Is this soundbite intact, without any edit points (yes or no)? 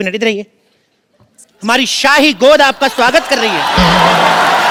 yes